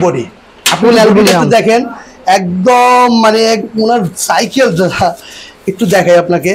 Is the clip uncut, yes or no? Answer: yes